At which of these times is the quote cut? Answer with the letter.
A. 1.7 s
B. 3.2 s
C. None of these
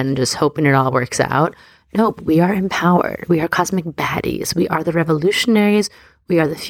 C